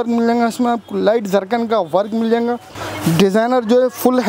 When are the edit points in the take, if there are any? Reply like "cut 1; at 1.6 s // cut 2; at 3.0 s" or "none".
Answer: cut 1; at 2.8 s